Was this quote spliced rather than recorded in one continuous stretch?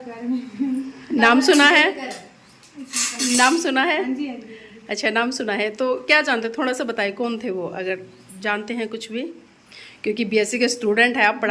no; 0 cuts

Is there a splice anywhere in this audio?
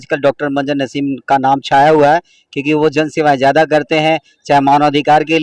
no; 0 cuts

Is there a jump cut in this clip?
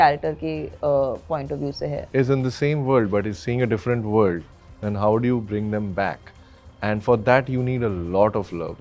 yes; 1 cut; at 2.0 s

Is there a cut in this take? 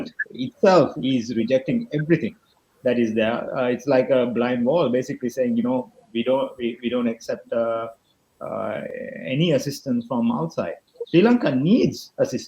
no; 0 cuts

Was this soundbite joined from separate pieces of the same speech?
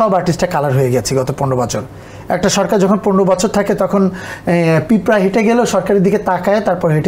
no; 0 cuts

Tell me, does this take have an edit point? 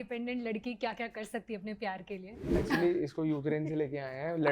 yes; 1 cut; at 2.6 s

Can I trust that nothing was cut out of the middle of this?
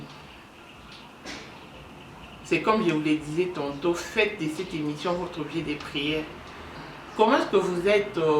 no; 1 cut; at 6.8 s

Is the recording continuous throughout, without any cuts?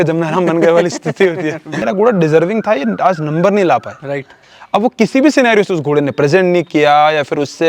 no; 1 cut; at 1.8 s

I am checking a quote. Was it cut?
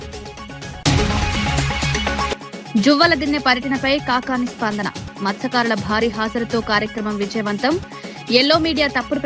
yes; 2 cuts; at 0.8 s, 2.3 s

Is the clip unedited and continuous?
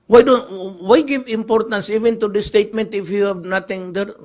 yes; 0 cuts

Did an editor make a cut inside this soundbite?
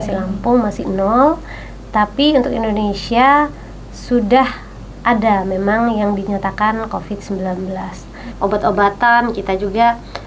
yes; 1 cut; at 8.2 s

